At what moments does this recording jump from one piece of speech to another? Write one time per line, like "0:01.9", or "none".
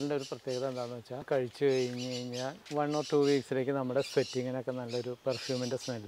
0:01.3
0:02.6

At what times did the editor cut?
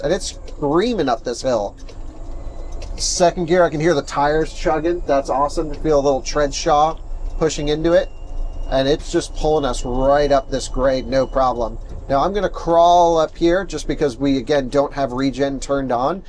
none

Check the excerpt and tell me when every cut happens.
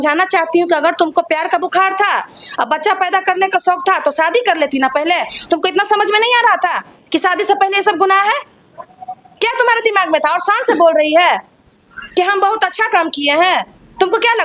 none

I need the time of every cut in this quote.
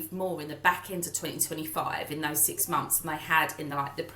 none

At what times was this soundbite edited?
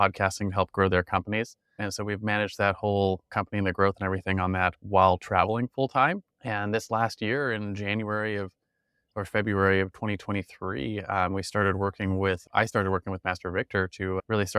0:01.8
0:03.3
0:06.3

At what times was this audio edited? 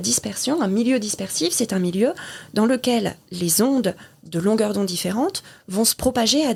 none

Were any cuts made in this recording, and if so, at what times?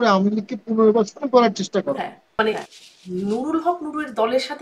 0:02.2

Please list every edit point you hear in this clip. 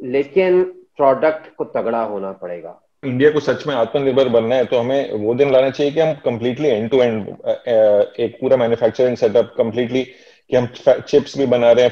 0:03.0

